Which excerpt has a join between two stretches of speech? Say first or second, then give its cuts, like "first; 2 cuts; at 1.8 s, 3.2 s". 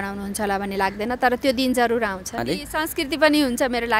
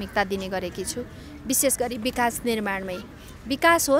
first; 1 cut; at 2.3 s